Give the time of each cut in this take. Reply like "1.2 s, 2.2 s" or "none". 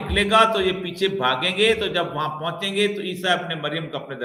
none